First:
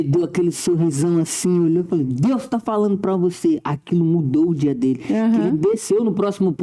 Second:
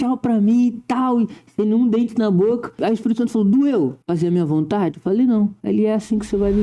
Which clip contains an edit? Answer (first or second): second